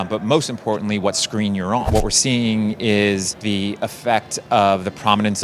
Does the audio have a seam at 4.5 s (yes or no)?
no